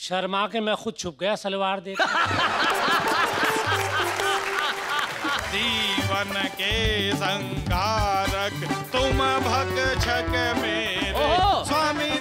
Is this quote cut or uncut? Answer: cut